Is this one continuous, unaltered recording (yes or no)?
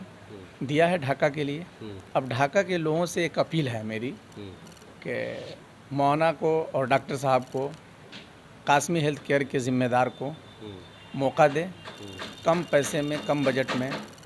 yes